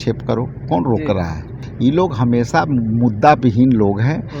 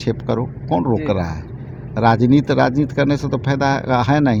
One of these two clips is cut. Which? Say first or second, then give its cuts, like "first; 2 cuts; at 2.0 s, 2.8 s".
first; 1 cut; at 1.6 s